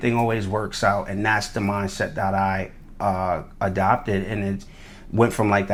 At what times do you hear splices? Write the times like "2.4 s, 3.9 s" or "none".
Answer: none